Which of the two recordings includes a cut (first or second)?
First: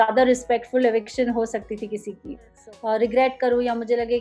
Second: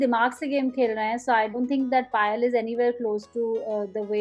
first